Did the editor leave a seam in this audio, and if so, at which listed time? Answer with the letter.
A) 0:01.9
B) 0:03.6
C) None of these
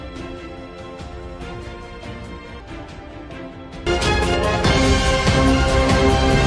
C